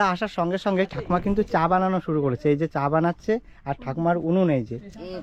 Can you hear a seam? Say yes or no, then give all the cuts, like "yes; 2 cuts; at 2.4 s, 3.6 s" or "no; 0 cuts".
no; 0 cuts